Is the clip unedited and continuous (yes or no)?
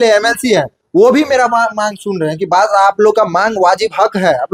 yes